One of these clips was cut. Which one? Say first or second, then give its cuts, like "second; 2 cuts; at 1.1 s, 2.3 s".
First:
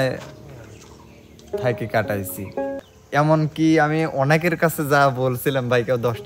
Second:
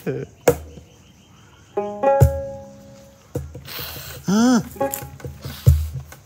first; 1 cut; at 2.8 s